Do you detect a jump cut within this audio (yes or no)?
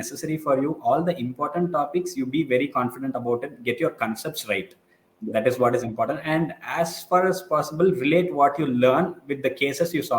no